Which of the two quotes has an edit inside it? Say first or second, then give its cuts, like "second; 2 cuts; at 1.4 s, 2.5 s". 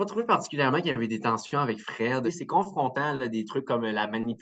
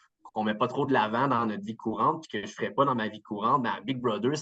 first; 1 cut; at 2.2 s